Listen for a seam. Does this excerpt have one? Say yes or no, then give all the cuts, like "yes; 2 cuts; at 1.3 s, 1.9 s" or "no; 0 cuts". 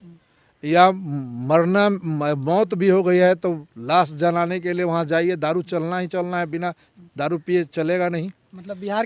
no; 0 cuts